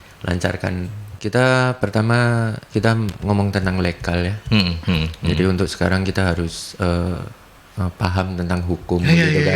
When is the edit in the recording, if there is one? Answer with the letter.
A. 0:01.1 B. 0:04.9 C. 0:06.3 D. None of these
A